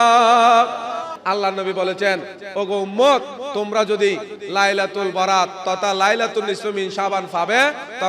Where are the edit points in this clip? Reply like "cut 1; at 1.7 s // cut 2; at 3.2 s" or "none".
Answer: cut 1; at 1.1 s